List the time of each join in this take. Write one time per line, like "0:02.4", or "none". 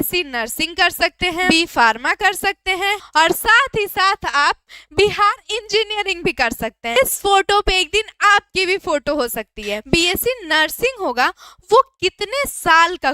0:01.5
0:03.0
0:07.0
0:09.8